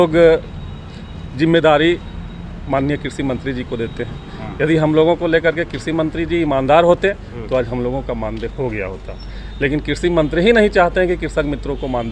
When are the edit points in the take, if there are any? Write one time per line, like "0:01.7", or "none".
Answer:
none